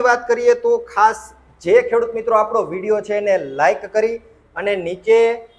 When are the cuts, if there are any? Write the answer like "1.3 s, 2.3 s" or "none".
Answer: none